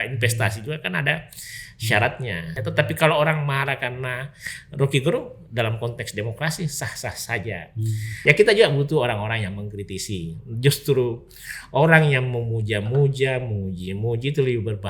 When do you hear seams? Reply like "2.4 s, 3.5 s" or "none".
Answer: 2.6 s, 8.2 s